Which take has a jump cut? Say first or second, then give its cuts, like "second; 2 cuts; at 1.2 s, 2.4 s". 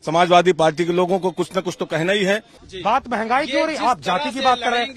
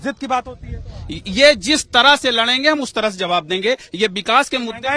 first; 1 cut; at 2.7 s